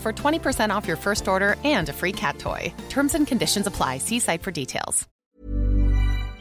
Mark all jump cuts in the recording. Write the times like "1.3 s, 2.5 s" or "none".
5.1 s